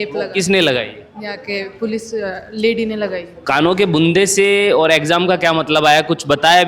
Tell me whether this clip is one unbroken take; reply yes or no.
no